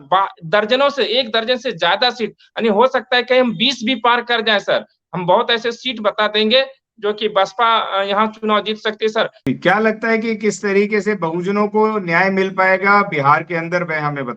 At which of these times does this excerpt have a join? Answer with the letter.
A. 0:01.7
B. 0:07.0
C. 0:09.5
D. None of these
C